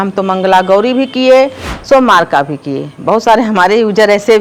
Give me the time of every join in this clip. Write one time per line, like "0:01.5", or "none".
none